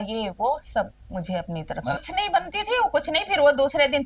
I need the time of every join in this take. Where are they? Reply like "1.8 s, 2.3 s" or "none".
2.0 s

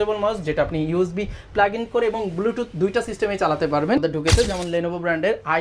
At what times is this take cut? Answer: 4.0 s

